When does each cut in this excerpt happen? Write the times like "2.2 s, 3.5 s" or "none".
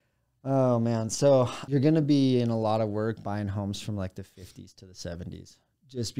1.6 s